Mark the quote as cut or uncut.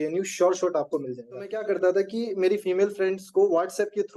cut